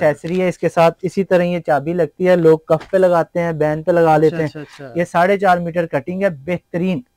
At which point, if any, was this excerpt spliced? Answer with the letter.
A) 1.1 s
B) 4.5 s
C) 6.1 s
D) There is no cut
D